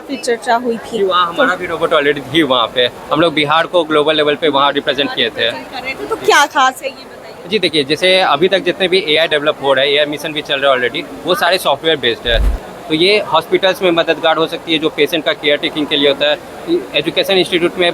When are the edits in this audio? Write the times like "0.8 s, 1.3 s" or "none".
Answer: 12.5 s